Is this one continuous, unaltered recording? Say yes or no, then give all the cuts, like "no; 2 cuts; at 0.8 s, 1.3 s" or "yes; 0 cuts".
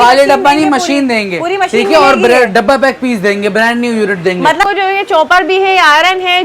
no; 1 cut; at 4.6 s